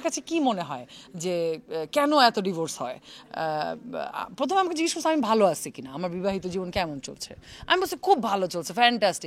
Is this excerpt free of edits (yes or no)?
yes